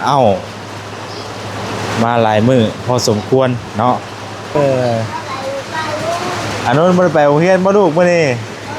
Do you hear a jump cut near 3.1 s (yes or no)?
no